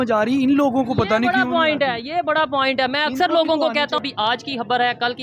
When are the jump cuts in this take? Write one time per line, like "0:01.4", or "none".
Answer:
0:04.0